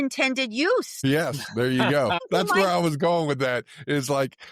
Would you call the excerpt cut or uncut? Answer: cut